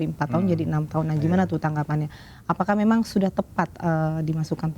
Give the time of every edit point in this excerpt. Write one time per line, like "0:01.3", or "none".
none